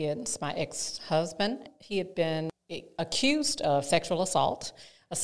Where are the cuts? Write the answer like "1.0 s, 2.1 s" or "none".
1.7 s, 2.5 s